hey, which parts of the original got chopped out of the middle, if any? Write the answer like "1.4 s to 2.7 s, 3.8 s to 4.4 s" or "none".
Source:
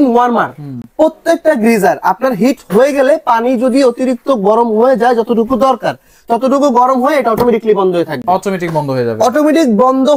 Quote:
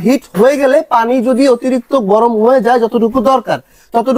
none